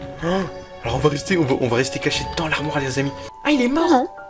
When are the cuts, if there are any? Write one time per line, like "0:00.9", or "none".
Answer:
0:03.2